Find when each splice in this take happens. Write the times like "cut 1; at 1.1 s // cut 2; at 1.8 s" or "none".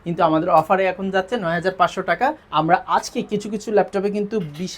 cut 1; at 2.4 s